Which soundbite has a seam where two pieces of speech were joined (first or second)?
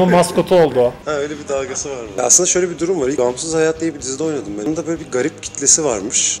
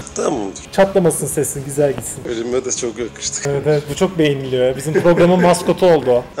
first